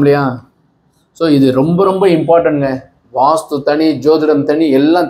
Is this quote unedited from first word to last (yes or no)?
yes